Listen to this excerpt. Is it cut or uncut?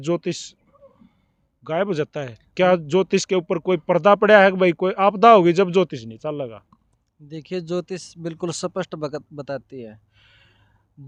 uncut